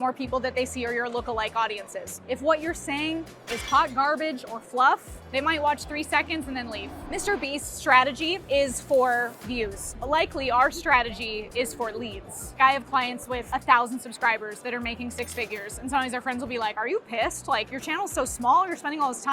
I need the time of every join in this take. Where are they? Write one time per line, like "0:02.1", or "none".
0:02.2
0:05.3
0:06.9
0:12.6